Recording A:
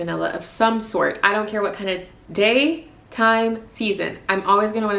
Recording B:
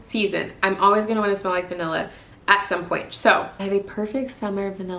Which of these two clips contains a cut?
B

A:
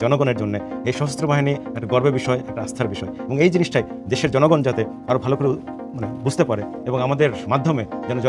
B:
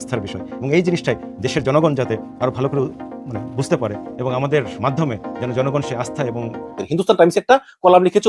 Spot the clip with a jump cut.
B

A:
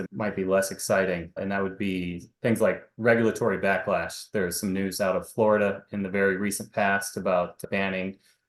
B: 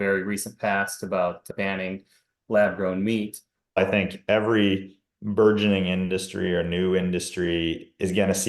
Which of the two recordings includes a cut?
B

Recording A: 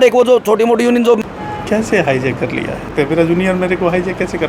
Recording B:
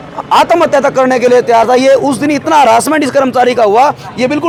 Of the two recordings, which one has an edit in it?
A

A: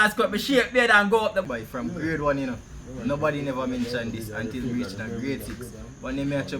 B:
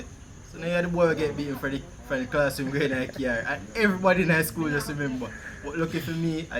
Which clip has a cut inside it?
A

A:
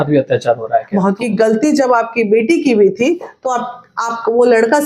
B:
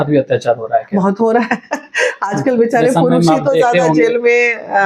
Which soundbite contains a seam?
A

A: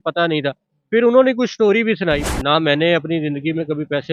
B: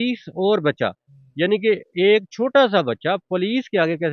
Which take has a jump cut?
A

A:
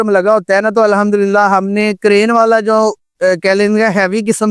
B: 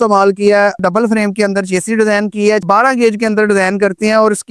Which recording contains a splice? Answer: B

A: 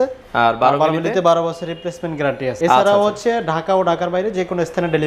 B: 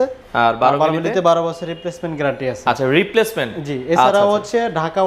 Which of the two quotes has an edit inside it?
A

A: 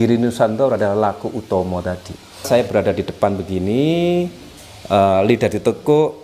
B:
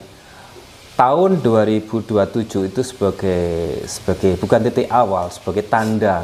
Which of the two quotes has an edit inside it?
A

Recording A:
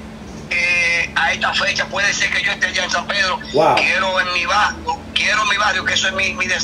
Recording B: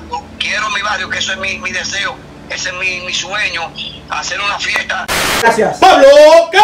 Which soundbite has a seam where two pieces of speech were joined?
B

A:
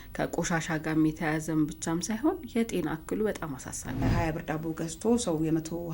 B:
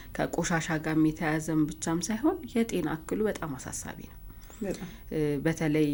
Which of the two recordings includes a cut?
A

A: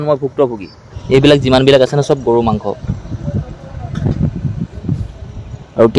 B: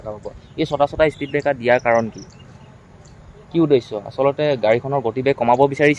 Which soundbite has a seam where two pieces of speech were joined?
A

